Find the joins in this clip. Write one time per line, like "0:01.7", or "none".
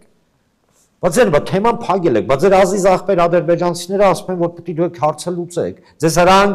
none